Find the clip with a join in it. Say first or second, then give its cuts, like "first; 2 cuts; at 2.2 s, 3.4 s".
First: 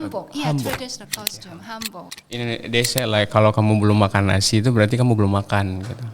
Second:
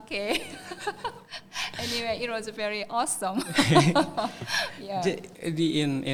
first; 1 cut; at 2.2 s